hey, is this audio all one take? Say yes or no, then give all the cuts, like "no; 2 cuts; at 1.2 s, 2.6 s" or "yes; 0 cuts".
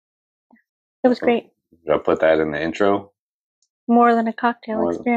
yes; 0 cuts